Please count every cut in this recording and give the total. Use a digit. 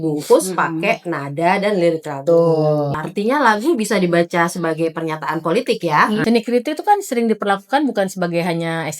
2